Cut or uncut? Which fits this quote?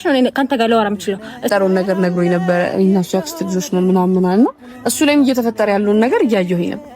cut